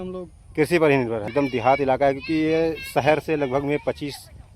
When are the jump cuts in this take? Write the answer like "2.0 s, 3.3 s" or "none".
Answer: 1.2 s